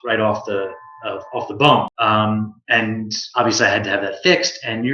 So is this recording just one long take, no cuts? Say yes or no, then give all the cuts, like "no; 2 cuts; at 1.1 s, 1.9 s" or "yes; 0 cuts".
no; 1 cut; at 1.9 s